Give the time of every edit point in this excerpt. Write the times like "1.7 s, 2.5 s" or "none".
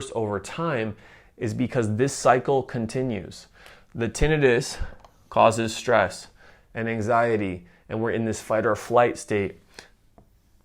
none